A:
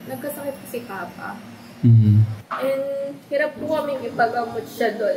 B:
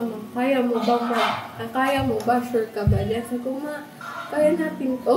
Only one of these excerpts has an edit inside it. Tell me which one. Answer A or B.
A